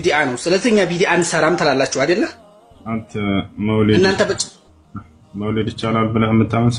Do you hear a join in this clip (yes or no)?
no